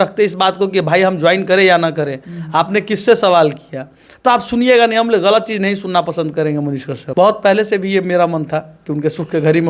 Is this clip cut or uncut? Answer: cut